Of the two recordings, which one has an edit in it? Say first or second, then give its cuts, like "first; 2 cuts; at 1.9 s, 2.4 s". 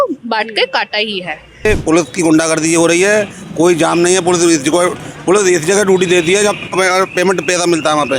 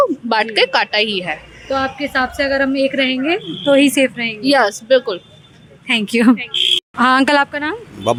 first; 1 cut; at 1.7 s